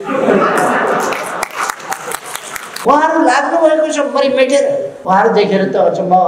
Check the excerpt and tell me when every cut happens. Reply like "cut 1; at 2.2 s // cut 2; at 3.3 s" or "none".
cut 1; at 2.8 s // cut 2; at 4.9 s